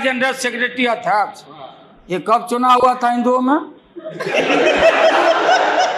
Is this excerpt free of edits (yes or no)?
yes